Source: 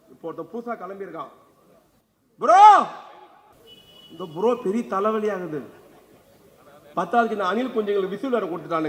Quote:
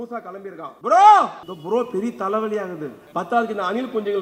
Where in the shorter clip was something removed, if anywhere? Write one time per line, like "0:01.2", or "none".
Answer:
0:00.8
0:01.5
0:03.0